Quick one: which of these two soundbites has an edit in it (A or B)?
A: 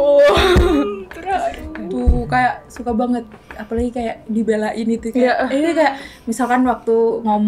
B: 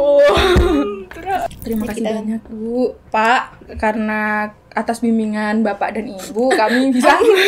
B